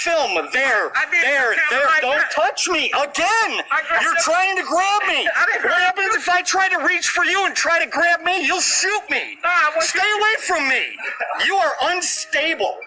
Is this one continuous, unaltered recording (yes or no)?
yes